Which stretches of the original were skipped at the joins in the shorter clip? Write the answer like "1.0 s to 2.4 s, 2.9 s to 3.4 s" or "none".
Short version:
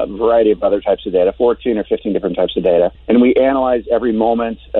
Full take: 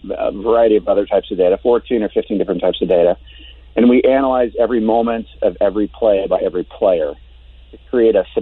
3.2 s to 3.7 s